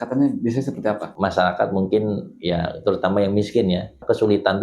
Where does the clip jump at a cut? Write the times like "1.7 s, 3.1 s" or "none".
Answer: 1.1 s